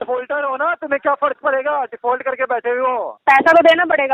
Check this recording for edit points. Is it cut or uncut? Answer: cut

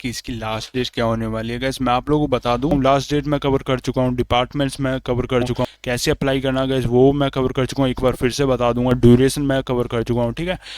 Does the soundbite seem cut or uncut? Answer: cut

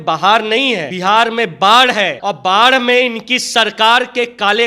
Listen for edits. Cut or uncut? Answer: cut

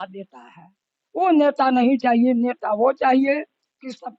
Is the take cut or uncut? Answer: uncut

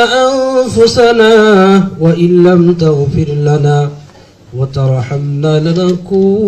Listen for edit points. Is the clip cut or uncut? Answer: uncut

